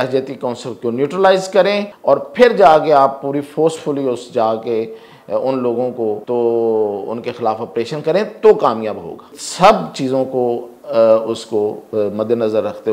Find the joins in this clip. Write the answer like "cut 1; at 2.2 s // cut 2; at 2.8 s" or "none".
cut 1; at 1.9 s // cut 2; at 6.2 s // cut 3; at 9.4 s